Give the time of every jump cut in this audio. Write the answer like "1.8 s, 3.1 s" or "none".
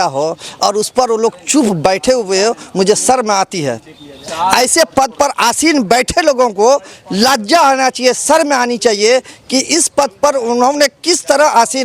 none